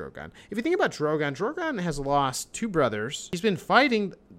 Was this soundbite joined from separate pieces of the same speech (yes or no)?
yes